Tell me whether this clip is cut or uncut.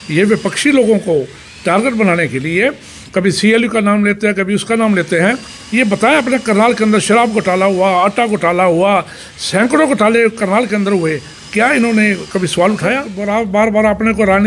cut